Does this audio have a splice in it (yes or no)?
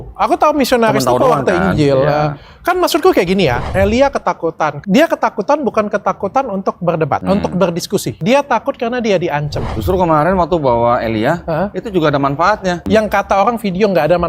yes